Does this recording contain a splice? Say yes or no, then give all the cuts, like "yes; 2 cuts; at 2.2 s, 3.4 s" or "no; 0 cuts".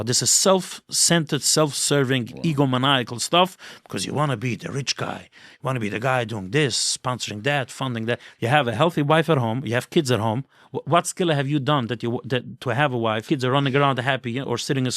yes; 2 cuts; at 8.3 s, 13.2 s